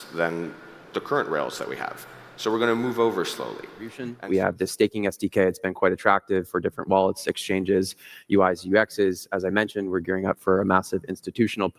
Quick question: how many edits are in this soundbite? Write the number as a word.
one